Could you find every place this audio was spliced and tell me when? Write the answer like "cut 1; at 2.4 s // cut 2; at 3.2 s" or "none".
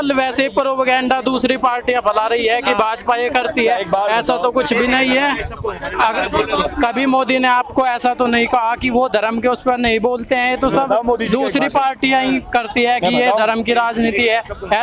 none